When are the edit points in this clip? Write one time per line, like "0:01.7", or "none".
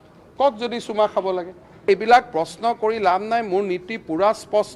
0:01.9